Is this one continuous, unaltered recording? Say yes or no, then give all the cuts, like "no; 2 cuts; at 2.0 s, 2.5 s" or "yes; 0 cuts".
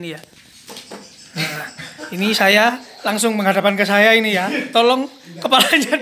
yes; 0 cuts